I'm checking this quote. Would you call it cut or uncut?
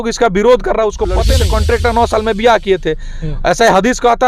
cut